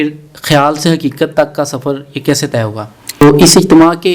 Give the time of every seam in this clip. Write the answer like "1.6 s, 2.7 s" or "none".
3.2 s